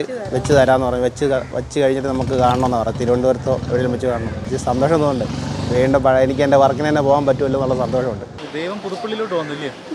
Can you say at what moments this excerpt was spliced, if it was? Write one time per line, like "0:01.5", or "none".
0:04.4
0:08.4